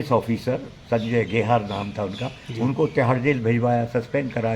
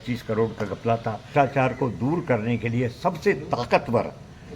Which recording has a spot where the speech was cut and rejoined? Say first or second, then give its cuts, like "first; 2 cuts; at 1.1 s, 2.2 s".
second; 1 cut; at 1.3 s